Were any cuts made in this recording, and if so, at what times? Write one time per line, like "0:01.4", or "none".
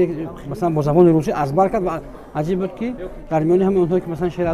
none